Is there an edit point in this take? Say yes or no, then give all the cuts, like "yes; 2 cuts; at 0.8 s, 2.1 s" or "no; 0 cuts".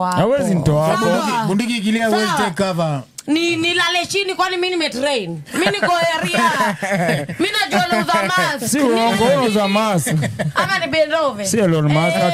no; 0 cuts